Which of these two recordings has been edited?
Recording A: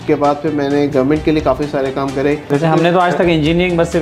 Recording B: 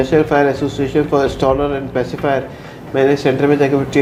A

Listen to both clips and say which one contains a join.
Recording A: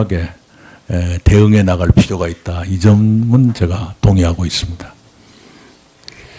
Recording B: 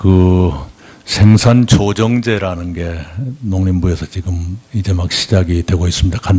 A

